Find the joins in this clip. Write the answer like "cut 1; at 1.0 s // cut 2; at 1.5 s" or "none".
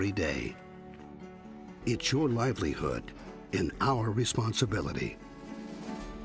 none